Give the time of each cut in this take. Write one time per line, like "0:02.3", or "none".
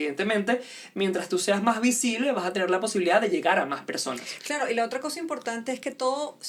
none